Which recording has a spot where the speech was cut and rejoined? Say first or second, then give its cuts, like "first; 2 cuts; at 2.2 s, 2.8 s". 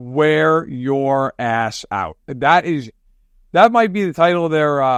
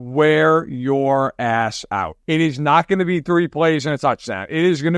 second; 1 cut; at 2.1 s